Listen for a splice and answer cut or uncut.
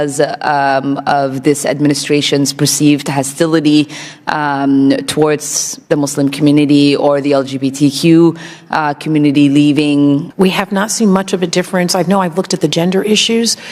cut